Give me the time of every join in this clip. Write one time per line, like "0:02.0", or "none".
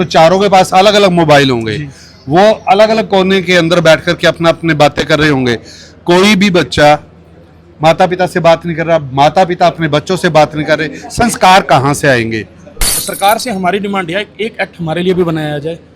0:12.9